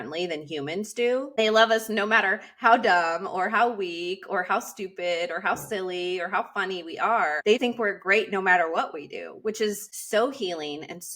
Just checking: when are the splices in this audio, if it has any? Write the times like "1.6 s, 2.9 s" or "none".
1.4 s, 7.6 s, 9.9 s